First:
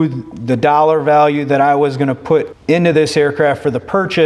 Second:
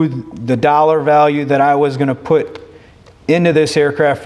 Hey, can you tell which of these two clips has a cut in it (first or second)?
first